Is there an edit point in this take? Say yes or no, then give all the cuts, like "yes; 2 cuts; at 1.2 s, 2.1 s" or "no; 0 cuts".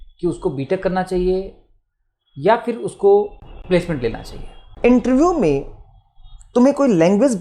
yes; 2 cuts; at 3.5 s, 4.7 s